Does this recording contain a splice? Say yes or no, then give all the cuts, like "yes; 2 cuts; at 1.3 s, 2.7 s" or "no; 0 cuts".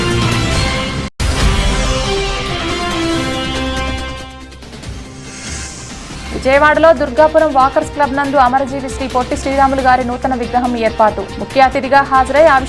no; 0 cuts